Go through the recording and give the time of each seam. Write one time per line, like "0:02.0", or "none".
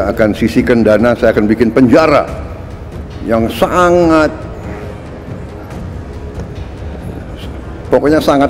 none